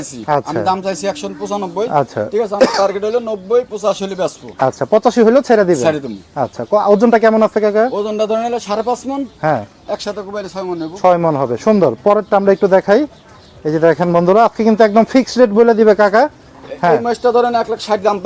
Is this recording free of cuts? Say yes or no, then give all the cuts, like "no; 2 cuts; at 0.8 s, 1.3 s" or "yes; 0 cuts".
yes; 0 cuts